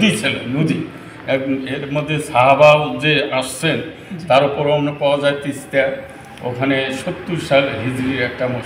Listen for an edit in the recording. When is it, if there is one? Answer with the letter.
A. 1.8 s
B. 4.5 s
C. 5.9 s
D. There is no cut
D